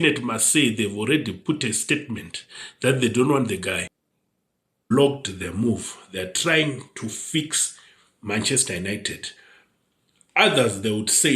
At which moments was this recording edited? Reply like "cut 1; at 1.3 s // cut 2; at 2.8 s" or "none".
cut 1; at 4.4 s